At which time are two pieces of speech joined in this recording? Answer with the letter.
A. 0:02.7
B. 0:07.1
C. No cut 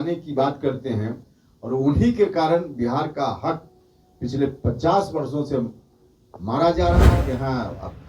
B